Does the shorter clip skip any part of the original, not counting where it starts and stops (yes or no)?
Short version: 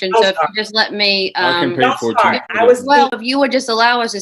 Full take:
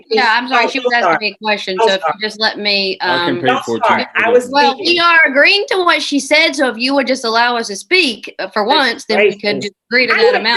yes